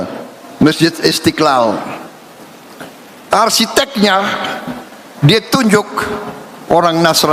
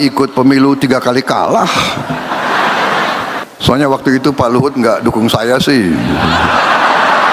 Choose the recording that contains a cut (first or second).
second